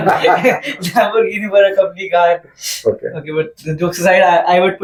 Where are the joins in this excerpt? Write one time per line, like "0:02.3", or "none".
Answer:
none